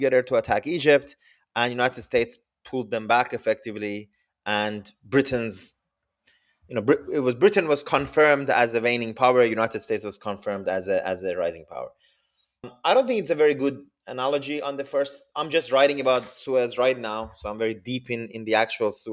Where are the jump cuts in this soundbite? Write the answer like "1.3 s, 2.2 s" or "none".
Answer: none